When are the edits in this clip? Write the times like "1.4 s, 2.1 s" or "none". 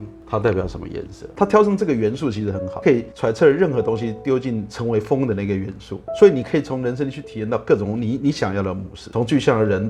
1.2 s